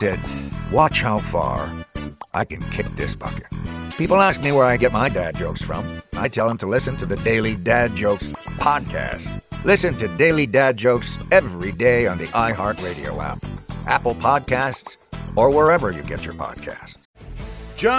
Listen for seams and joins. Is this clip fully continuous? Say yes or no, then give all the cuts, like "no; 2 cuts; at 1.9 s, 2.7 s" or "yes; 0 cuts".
yes; 0 cuts